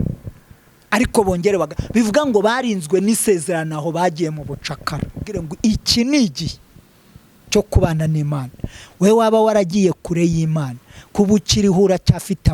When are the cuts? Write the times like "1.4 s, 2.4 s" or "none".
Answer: 5.5 s